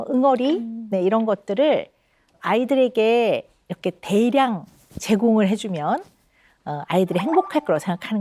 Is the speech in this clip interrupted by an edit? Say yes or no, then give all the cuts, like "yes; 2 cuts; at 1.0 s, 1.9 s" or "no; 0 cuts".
no; 0 cuts